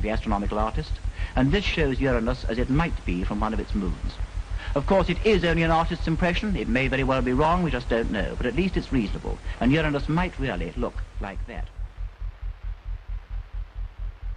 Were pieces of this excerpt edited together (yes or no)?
yes